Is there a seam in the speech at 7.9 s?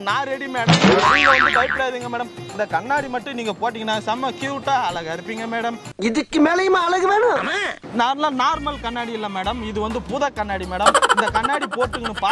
yes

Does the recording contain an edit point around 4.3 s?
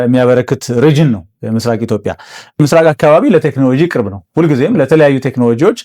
no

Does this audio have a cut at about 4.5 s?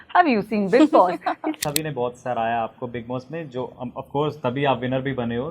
no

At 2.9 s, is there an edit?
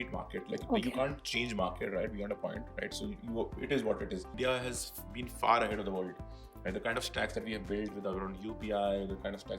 no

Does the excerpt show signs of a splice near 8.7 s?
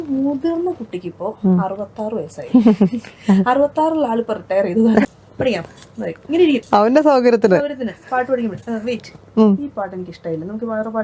no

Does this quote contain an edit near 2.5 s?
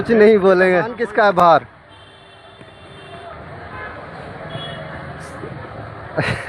no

